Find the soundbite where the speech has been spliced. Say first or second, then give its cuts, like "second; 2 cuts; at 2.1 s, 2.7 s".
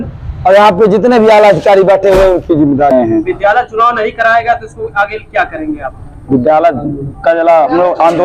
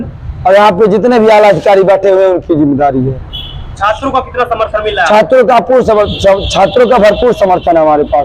first; 1 cut; at 2.9 s